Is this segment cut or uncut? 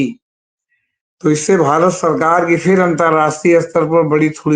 uncut